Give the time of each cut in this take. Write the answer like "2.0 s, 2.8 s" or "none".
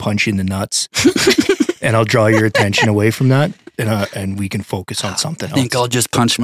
none

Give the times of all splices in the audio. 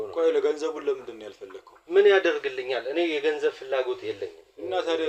none

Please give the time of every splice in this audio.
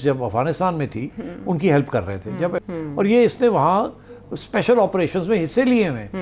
2.6 s

